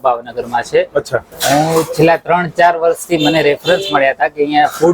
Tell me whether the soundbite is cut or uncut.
cut